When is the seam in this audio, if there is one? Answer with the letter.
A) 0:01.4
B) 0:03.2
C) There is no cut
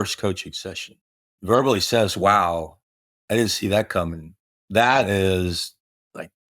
A